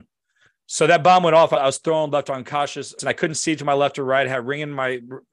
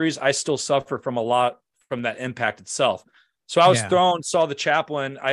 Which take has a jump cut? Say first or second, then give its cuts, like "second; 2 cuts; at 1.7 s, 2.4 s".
first; 1 cut; at 3.0 s